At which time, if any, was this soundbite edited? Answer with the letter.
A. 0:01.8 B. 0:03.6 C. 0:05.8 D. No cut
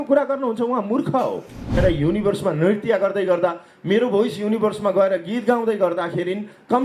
A